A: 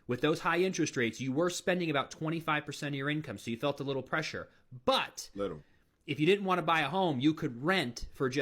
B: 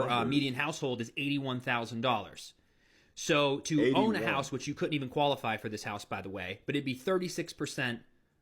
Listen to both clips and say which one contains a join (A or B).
B